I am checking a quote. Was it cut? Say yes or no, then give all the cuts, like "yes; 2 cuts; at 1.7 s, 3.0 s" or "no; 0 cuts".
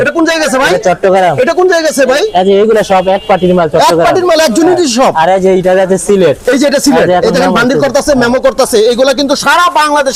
no; 0 cuts